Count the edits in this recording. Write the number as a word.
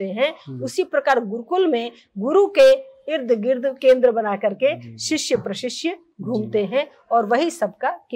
zero